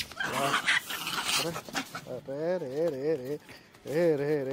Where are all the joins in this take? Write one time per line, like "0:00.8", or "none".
none

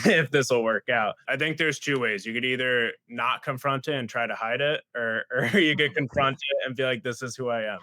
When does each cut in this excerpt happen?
0:01.3

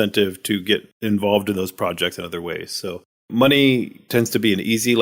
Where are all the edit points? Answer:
0:00.9
0:03.3

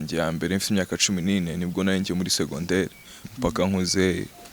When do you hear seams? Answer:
0:03.2

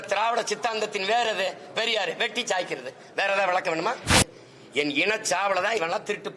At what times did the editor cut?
0:04.2

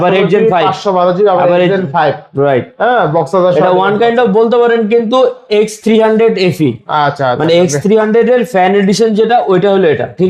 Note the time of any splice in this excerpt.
none

